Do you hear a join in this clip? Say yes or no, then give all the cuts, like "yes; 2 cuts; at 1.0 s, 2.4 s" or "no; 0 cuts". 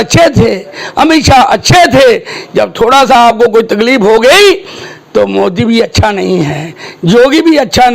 no; 0 cuts